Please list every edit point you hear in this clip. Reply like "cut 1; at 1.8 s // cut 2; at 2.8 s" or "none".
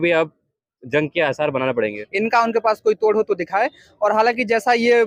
cut 1; at 2.0 s